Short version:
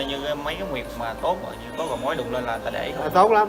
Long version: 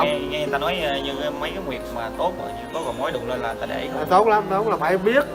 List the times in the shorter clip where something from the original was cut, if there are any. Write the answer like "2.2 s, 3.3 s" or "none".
none